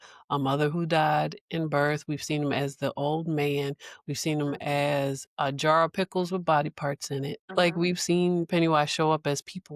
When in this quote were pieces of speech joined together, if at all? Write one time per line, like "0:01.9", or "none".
0:07.4